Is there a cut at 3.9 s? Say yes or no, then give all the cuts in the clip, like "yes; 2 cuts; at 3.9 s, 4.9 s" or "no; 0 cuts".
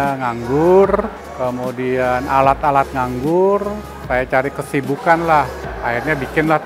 yes; 2 cuts; at 1.2 s, 3.9 s